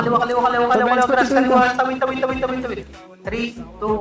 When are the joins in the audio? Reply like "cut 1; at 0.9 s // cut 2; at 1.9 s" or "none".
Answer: none